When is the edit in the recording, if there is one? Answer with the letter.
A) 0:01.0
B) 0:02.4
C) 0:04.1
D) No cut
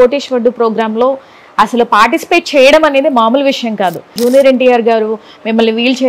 C